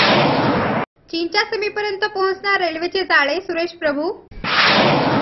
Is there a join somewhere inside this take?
yes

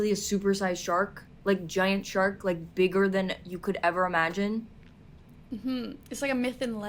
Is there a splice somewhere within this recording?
no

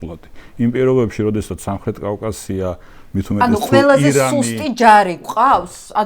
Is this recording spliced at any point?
no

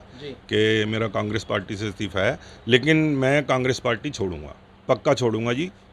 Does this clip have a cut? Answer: yes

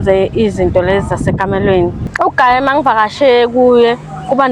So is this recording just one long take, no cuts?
no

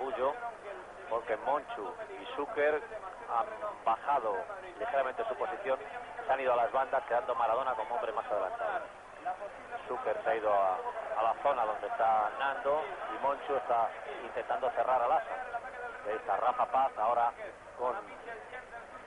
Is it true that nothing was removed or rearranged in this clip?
no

